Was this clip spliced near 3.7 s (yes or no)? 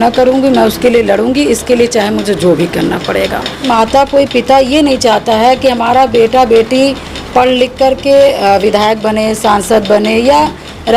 yes